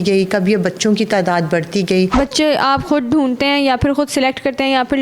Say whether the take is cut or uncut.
cut